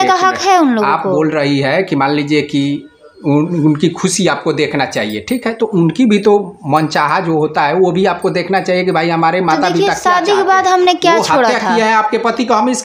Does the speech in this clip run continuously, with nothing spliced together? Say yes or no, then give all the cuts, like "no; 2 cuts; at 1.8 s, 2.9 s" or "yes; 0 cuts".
yes; 0 cuts